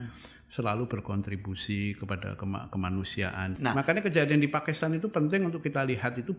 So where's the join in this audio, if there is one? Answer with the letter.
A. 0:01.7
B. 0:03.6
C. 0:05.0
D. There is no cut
B